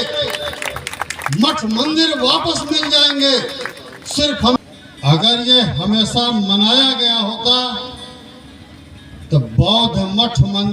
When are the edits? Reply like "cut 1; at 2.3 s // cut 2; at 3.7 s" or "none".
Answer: cut 1; at 4.6 s